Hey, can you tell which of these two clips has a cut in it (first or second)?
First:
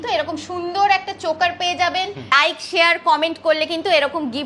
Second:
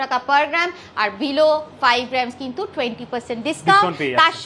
first